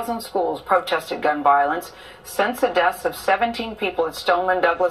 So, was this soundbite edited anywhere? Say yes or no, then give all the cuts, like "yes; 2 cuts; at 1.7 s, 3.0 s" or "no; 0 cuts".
yes; 1 cut; at 2.7 s